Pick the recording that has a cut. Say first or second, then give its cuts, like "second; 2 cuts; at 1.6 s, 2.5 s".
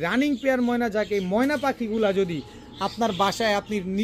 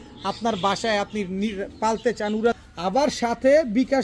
second; 1 cut; at 2.6 s